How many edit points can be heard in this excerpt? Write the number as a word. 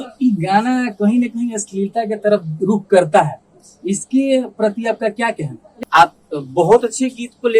one